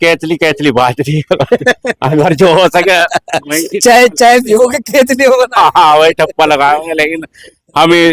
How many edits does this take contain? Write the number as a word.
zero